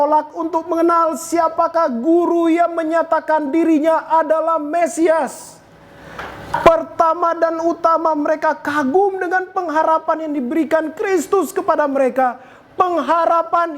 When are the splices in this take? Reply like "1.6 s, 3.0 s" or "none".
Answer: none